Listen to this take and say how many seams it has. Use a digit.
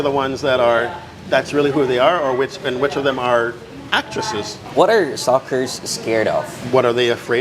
1